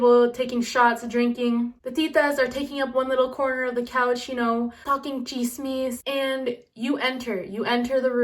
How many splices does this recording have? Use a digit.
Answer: 1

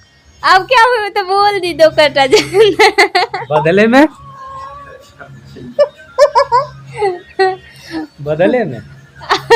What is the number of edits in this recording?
0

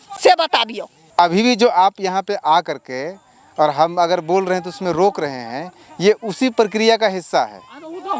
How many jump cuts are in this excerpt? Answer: 1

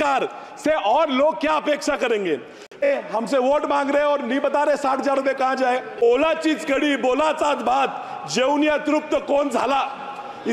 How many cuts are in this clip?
2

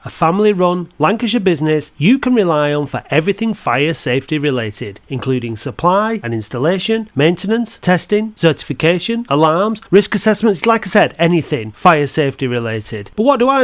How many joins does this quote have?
0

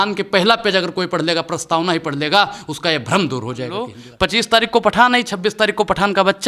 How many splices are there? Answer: 1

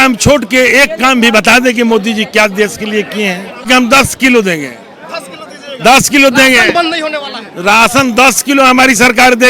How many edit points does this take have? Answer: 1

